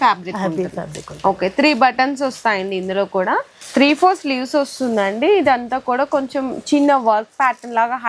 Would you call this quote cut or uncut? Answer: cut